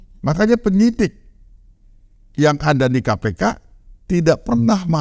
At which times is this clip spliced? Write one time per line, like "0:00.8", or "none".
none